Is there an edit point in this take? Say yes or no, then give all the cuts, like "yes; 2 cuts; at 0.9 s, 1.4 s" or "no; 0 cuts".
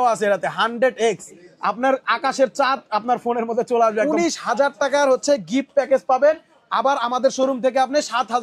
yes; 1 cut; at 4.0 s